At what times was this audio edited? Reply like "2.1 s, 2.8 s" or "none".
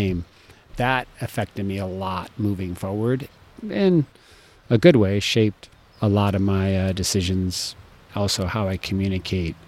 3.4 s